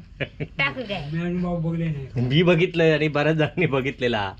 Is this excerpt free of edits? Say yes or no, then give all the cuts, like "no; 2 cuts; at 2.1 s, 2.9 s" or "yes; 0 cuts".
yes; 0 cuts